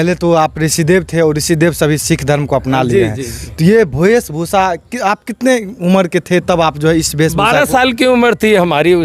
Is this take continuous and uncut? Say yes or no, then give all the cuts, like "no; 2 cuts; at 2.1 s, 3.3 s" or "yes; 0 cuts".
yes; 0 cuts